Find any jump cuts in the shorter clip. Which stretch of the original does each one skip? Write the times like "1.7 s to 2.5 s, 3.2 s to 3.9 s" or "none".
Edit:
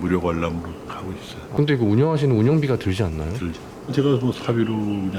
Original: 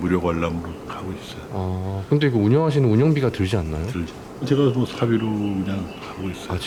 1.5 s to 2.0 s